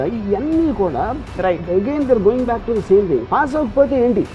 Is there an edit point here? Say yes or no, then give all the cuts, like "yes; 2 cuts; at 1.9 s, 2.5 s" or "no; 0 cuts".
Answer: no; 0 cuts